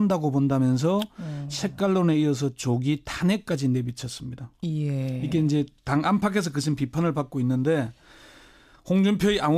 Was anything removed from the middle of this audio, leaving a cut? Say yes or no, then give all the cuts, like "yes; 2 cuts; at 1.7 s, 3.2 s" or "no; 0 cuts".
no; 0 cuts